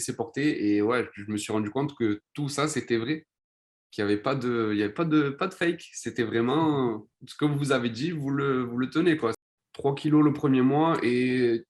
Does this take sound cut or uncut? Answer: cut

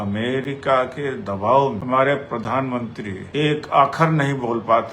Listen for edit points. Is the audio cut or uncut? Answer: cut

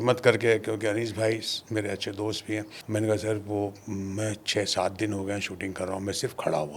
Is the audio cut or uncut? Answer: cut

